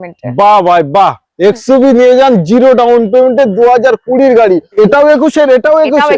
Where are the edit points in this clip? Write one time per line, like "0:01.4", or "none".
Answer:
0:04.8